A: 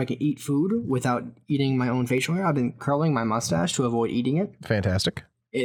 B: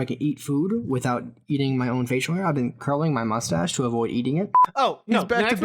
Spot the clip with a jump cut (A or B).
B